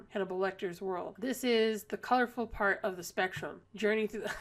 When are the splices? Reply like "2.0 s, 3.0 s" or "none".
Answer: 1.1 s